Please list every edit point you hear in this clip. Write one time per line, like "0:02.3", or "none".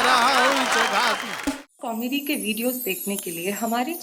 0:01.5